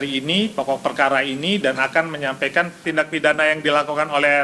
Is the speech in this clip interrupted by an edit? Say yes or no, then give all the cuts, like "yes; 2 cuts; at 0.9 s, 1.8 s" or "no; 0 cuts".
yes; 1 cut; at 2.8 s